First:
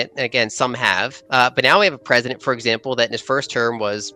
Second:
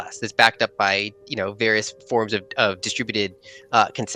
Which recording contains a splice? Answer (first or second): first